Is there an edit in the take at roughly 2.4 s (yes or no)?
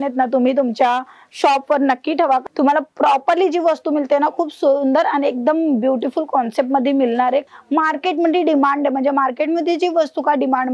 yes